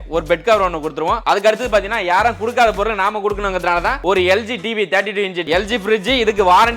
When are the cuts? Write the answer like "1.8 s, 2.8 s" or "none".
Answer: 1.2 s, 5.4 s